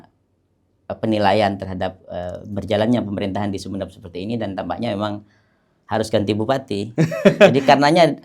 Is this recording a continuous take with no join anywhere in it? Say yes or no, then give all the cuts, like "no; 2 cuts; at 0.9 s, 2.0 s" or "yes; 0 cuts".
yes; 0 cuts